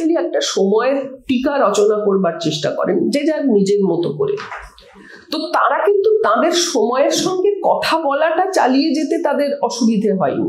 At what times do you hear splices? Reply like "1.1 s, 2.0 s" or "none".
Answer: none